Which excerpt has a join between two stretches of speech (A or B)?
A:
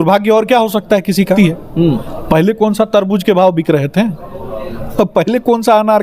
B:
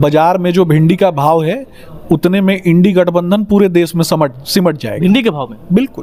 A